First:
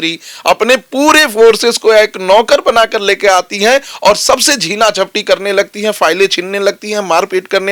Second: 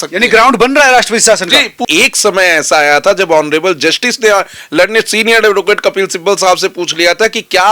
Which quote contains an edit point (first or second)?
second